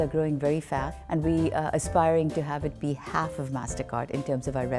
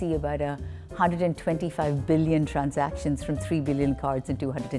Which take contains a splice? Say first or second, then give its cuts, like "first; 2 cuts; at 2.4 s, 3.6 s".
first; 1 cut; at 1.0 s